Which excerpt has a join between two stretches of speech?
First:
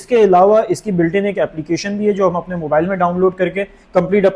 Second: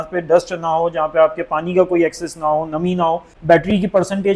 second; 1 cut; at 3.3 s

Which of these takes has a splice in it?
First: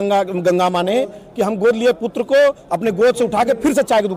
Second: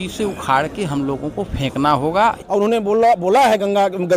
second; 1 cut; at 2.7 s

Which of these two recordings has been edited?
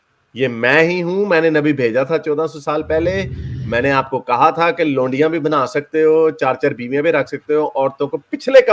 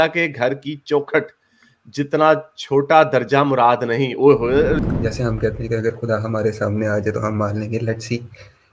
second; 1 cut; at 4.8 s

